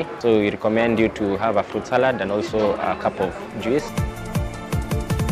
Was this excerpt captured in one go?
no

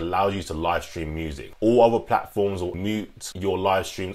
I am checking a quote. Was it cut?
yes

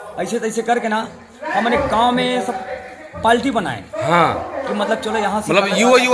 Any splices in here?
no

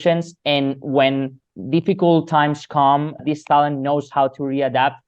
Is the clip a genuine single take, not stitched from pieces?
no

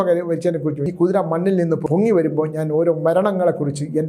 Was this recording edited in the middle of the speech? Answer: yes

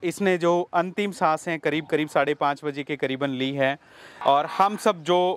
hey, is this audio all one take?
no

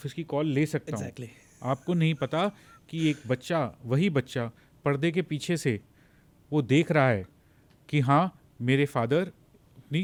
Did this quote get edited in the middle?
no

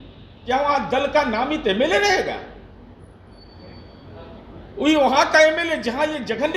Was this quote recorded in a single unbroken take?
yes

